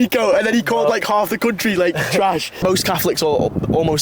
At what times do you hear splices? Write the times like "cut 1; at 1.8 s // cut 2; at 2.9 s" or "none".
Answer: cut 1; at 2.6 s